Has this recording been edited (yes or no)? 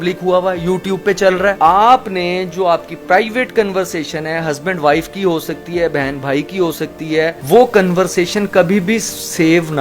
yes